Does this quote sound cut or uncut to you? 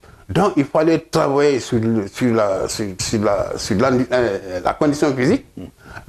uncut